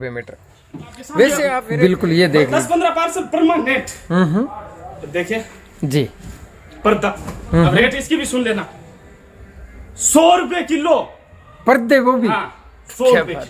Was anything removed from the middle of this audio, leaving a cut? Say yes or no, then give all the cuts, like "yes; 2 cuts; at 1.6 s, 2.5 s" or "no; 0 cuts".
yes; 1 cut; at 1.6 s